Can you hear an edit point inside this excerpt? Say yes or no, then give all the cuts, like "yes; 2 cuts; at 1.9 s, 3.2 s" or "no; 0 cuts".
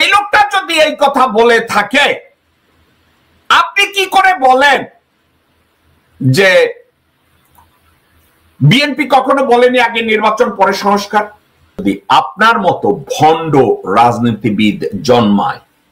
yes; 1 cut; at 11.8 s